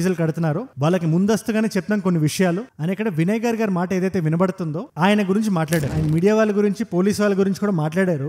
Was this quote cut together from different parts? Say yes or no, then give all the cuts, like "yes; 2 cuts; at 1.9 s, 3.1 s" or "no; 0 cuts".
yes; 2 cuts; at 2.7 s, 5.9 s